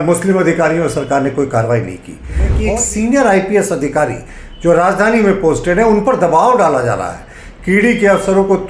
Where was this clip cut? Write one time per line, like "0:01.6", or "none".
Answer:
0:02.6